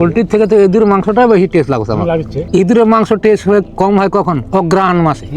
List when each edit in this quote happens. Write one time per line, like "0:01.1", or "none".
0:02.5